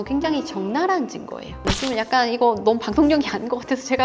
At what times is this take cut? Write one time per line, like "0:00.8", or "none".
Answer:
0:01.7